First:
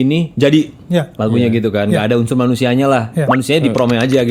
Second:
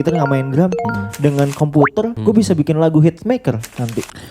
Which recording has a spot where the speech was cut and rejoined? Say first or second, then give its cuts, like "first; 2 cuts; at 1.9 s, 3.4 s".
second; 1 cut; at 2.1 s